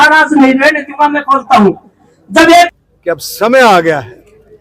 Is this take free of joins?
no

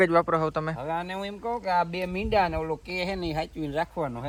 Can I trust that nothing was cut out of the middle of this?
yes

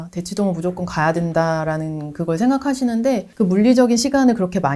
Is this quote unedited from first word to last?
no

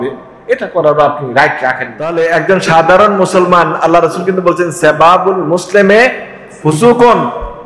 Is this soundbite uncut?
no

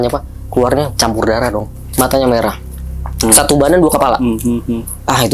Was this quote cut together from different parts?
yes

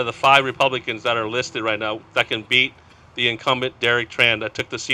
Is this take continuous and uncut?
yes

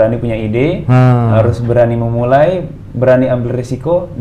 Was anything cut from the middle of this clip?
no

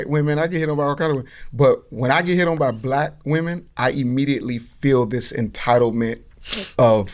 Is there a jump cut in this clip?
no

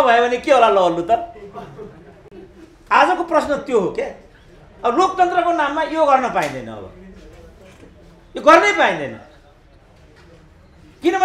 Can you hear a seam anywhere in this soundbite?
no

